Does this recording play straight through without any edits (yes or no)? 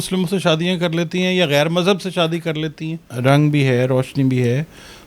no